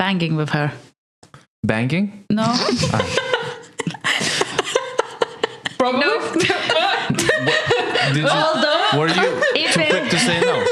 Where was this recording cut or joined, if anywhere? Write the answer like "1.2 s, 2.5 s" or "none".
none